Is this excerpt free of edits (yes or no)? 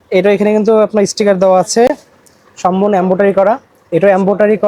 yes